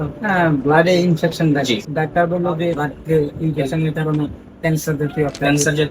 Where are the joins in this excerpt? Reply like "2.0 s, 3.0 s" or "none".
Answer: 1.9 s, 2.8 s